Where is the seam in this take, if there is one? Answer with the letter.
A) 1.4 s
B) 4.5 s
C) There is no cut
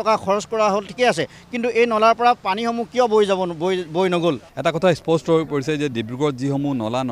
B